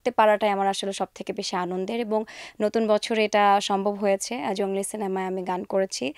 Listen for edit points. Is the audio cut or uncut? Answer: uncut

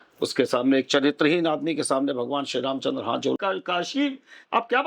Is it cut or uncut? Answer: cut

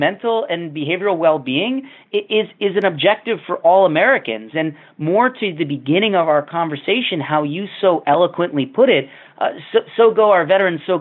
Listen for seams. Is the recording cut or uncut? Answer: uncut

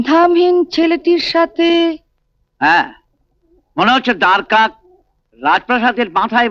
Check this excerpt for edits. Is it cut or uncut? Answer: uncut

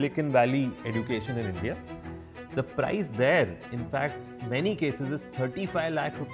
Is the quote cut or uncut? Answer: uncut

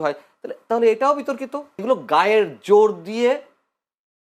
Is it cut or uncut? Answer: cut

